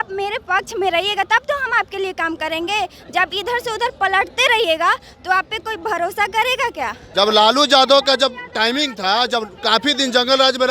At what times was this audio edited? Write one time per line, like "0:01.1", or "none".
0:07.0